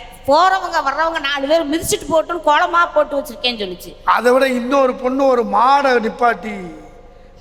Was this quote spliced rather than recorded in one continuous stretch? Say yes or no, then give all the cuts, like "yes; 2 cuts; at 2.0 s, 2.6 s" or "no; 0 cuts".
no; 0 cuts